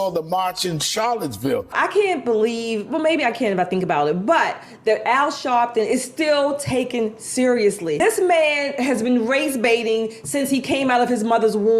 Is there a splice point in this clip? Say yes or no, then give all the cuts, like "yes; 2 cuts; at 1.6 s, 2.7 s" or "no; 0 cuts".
yes; 2 cuts; at 1.7 s, 8.0 s